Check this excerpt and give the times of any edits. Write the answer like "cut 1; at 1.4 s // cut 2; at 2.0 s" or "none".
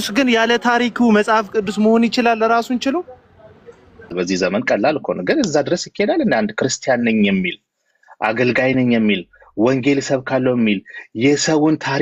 none